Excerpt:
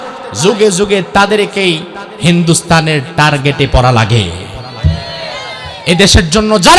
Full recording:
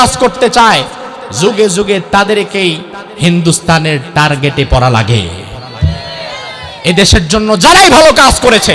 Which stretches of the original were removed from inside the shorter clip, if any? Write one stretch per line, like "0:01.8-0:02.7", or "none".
none